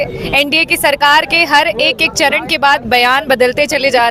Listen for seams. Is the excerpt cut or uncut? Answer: uncut